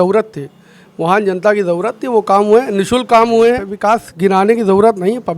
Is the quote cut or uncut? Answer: cut